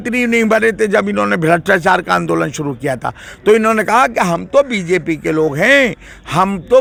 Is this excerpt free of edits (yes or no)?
yes